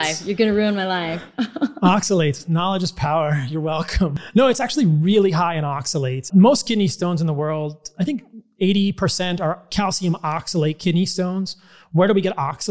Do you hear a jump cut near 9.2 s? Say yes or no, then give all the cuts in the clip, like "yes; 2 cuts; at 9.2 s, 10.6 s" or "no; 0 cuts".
no; 2 cuts; at 4.2 s, 6.3 s